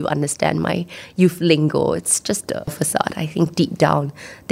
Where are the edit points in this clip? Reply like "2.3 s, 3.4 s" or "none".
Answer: 2.8 s